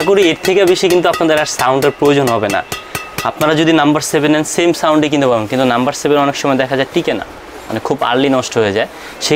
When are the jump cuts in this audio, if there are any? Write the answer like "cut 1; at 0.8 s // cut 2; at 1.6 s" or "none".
none